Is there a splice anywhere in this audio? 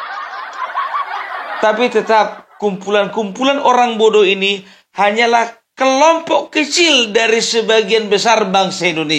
yes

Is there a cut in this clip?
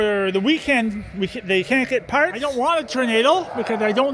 yes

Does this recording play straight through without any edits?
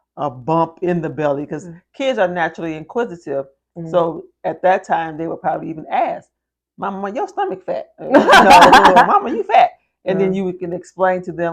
yes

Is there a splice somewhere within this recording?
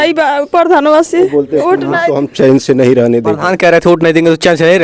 yes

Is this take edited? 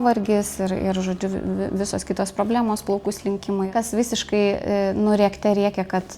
yes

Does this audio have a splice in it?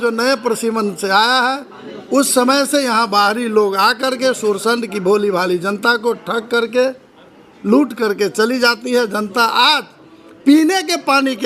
no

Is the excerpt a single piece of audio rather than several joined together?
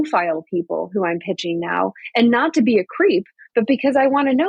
yes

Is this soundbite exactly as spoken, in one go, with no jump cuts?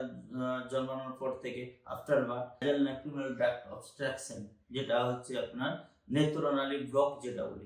no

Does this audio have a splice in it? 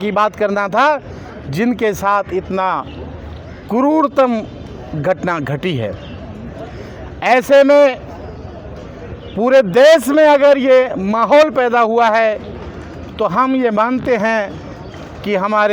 no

